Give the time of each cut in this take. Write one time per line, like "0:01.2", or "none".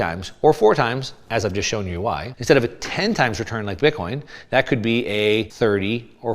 0:02.3
0:05.5